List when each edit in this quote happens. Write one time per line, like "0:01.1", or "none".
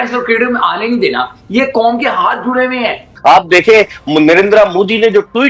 0:03.1

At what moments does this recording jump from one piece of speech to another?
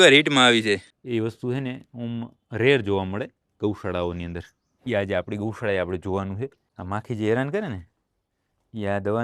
0:00.9
0:06.7

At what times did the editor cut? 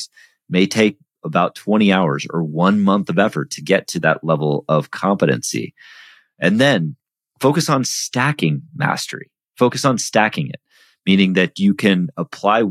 none

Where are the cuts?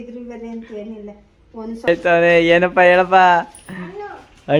0:01.9

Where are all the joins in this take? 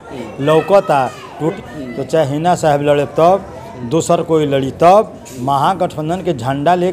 0:01.5

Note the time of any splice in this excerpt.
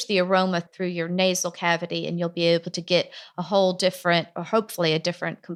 none

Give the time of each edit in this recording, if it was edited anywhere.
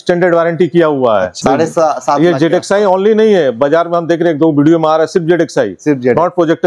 0:01.3

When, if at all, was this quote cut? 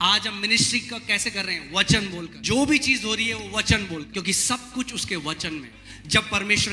0:02.3
0:04.1
0:05.8

